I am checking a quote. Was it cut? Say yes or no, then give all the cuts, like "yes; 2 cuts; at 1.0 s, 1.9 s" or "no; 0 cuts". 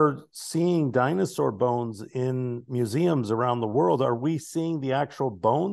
no; 0 cuts